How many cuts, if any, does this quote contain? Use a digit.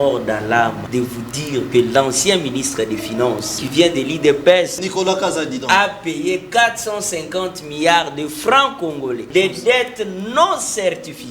4